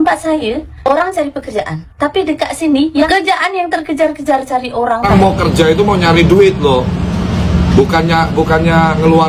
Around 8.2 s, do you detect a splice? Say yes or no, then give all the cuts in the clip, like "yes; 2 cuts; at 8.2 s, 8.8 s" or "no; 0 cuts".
no; 2 cuts; at 3.1 s, 5.1 s